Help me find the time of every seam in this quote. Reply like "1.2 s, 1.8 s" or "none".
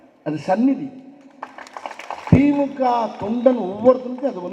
2.3 s